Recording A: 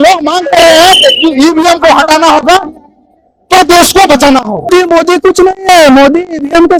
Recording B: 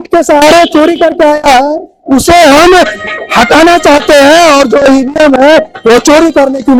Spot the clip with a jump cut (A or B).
A